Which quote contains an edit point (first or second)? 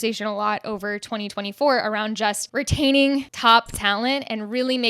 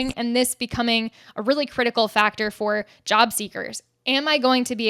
first